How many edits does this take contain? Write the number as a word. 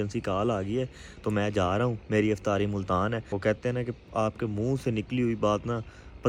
one